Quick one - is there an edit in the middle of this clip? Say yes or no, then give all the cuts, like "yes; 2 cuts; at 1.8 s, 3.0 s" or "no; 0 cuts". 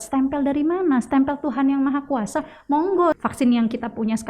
yes; 1 cut; at 3.2 s